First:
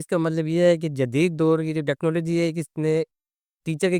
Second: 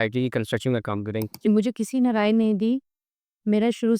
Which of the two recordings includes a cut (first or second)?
second